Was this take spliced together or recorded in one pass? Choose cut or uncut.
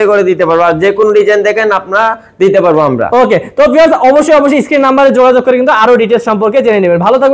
uncut